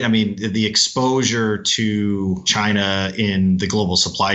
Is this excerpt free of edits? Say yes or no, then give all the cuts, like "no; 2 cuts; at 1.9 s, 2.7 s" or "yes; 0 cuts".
no; 1 cut; at 2.5 s